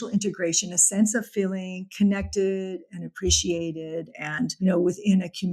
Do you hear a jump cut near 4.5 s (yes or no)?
yes